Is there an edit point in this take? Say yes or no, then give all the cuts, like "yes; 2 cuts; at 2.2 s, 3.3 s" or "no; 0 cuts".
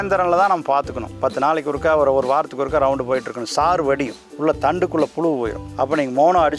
yes; 3 cuts; at 1.0 s, 4.2 s, 5.6 s